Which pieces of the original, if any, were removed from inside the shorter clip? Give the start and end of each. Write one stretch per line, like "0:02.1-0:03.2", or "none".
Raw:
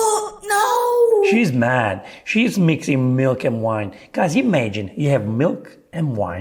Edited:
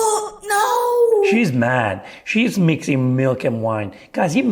none